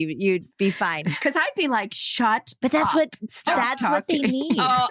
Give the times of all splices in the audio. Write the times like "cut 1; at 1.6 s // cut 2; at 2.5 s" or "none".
cut 1; at 1.0 s